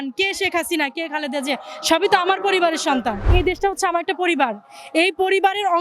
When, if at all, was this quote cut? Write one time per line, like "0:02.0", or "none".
0:03.3